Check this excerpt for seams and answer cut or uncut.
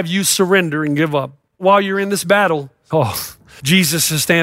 cut